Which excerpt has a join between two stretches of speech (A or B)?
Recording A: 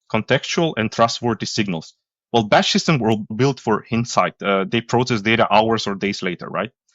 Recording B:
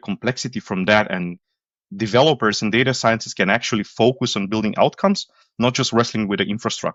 A